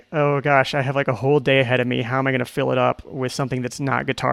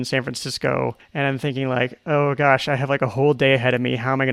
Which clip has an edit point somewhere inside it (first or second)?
second